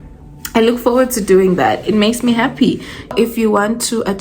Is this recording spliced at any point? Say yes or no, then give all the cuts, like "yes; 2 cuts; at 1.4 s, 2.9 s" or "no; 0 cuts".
yes; 1 cut; at 3.0 s